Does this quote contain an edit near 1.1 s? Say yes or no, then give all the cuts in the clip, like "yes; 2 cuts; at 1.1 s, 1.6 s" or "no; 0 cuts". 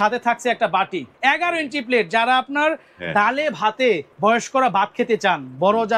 yes; 2 cuts; at 1.1 s, 4.1 s